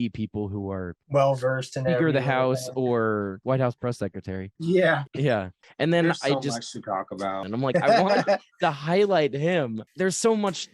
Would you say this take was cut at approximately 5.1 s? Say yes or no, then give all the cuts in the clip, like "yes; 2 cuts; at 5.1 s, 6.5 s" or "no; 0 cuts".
yes; 5 cuts; at 3.4 s, 4.5 s, 5.1 s, 7.4 s, 9.9 s